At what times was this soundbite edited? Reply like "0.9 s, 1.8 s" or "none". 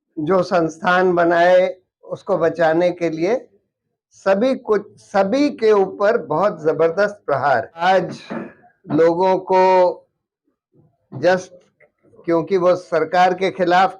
7.8 s